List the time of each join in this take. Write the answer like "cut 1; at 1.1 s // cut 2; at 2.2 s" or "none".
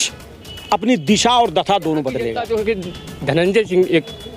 cut 1; at 2.4 s